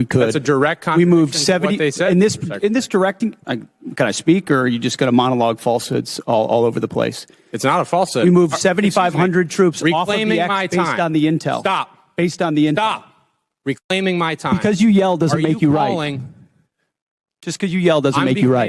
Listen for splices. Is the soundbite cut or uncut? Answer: uncut